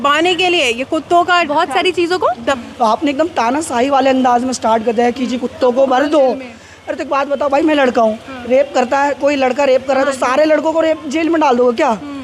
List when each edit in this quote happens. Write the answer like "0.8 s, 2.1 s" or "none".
2.6 s